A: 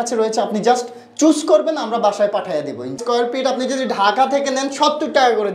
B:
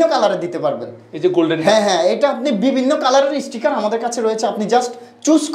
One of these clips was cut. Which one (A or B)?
A